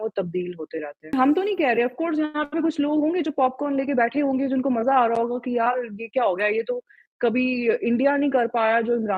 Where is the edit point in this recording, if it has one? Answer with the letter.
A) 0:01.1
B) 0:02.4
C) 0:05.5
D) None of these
A